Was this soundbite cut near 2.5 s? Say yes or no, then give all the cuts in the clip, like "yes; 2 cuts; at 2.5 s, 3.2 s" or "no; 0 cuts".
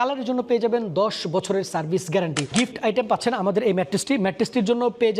yes; 1 cut; at 2.5 s